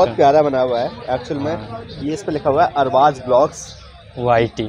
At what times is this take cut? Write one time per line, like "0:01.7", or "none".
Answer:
none